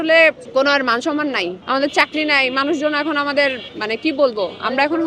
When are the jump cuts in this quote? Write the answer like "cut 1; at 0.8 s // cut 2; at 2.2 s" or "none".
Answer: none